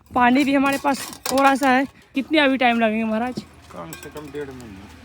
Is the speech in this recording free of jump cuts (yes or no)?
no